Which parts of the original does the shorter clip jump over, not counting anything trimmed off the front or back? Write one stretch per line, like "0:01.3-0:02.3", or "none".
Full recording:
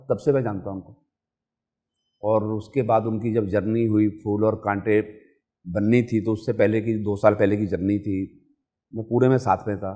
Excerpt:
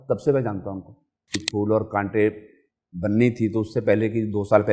0:01.5-0:04.2